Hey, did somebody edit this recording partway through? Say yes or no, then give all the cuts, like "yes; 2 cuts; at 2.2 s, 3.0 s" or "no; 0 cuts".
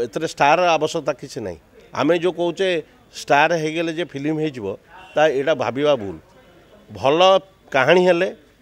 no; 0 cuts